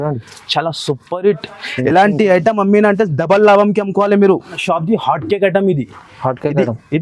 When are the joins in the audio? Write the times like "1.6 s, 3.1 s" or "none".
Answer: 4.6 s